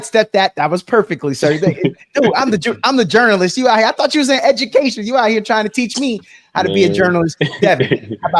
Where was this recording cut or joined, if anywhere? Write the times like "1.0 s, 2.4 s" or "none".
none